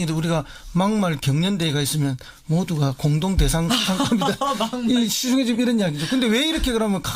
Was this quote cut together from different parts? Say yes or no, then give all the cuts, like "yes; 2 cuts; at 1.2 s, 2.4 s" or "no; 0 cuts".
no; 0 cuts